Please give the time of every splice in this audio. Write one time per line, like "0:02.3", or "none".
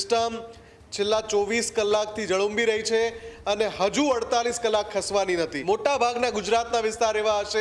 0:05.6